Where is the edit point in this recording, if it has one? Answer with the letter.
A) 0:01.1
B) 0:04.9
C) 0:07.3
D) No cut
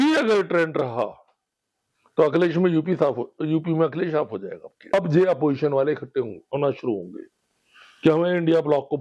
B